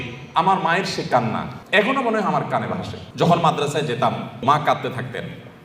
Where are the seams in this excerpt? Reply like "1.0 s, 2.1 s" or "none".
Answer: 1.5 s, 3.0 s, 4.4 s